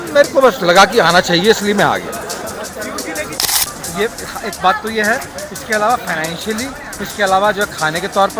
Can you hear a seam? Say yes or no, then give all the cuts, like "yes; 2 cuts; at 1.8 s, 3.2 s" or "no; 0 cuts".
yes; 1 cut; at 3.7 s